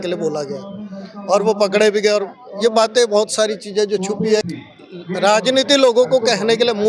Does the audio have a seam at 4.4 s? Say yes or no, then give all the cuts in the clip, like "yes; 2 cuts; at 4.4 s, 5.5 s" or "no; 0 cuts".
yes; 1 cut; at 4.4 s